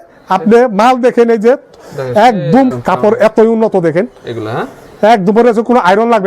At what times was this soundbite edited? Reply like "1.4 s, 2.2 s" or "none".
2.7 s